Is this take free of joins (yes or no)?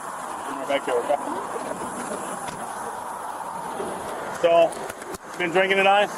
yes